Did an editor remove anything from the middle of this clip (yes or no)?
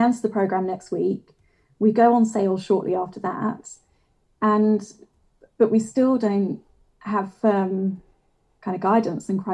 no